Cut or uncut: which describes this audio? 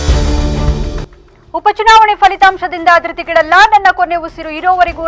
cut